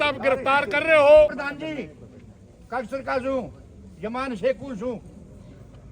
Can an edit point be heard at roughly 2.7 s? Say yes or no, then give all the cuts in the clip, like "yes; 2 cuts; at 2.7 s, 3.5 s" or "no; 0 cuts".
no; 1 cut; at 1.4 s